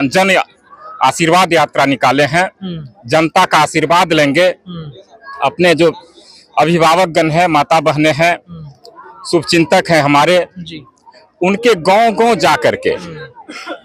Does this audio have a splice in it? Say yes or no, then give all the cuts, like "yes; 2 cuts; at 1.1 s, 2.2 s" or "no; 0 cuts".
no; 0 cuts